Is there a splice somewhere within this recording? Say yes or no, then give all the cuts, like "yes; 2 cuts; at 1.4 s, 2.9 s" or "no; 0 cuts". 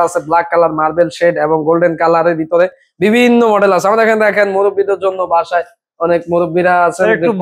no; 0 cuts